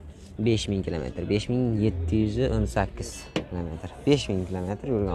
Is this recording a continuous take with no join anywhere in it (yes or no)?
yes